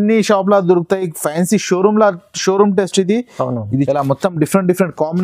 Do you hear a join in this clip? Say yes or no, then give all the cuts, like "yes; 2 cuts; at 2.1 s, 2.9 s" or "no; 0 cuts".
yes; 1 cut; at 3.9 s